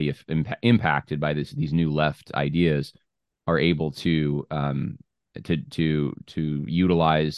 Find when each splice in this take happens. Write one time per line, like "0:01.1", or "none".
none